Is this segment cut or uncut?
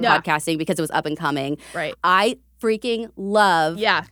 cut